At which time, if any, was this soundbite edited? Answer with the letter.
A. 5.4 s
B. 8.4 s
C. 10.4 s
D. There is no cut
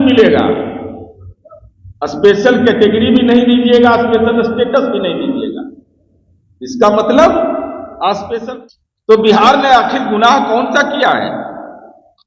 B